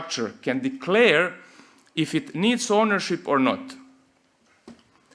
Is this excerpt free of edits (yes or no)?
yes